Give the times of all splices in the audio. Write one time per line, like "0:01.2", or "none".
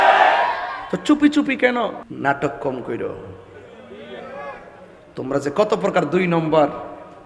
0:02.0